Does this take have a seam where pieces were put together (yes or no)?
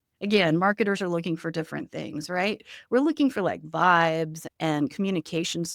yes